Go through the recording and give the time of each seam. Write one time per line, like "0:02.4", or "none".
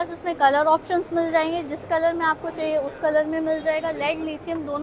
none